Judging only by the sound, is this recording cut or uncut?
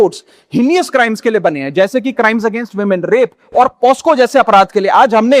uncut